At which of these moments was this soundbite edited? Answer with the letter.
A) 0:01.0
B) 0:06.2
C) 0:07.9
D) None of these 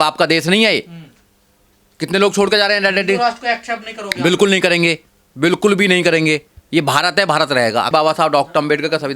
C